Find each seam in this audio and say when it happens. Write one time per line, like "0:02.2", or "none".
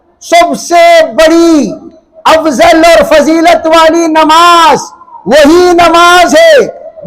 none